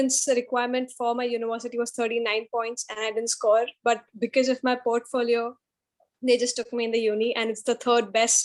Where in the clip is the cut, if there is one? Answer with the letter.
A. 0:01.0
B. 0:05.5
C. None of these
C